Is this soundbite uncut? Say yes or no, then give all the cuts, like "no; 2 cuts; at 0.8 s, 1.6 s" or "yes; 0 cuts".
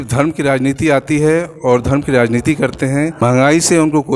no; 1 cut; at 3.2 s